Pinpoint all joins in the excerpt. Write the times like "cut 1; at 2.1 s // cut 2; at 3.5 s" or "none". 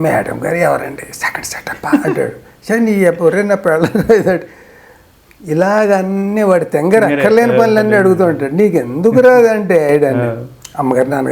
none